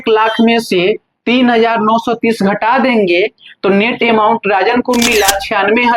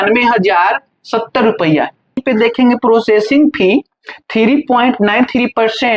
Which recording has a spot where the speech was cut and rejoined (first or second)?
second